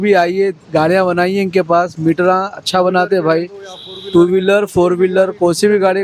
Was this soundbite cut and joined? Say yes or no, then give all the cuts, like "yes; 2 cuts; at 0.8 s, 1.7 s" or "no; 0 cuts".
no; 0 cuts